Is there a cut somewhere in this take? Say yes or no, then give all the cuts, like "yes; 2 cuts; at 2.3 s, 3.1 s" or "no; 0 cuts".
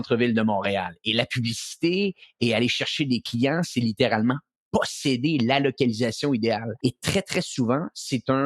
yes; 1 cut; at 6.7 s